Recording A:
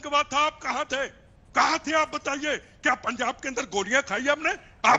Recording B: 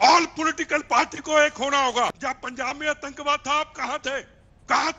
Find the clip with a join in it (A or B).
B